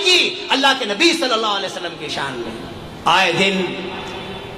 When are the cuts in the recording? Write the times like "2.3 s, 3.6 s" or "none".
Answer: 2.9 s